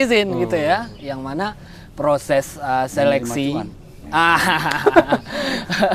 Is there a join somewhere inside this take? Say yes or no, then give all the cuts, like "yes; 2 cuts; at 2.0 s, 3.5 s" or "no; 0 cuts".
no; 0 cuts